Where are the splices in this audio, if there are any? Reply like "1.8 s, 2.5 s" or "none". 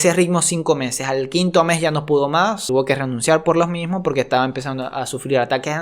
2.6 s